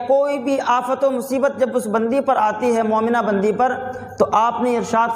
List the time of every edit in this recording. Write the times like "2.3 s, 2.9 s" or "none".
none